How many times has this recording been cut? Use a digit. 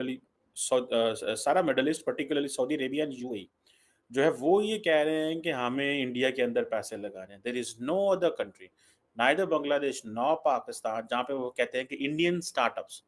0